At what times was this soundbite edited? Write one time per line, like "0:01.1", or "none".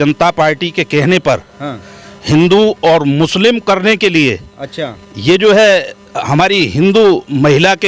none